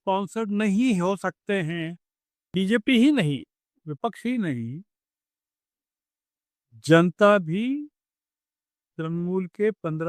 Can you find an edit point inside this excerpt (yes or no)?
yes